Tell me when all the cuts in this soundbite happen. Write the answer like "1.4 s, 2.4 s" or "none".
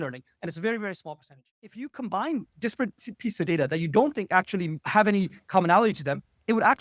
1.8 s, 4.8 s